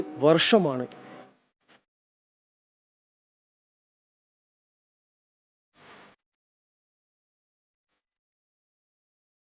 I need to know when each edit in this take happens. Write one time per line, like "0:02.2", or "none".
none